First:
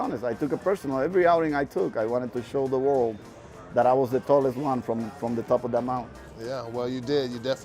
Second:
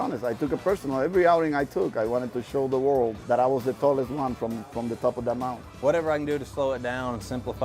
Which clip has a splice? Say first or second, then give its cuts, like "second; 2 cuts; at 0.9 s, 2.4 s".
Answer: second; 2 cuts; at 3.2 s, 5.7 s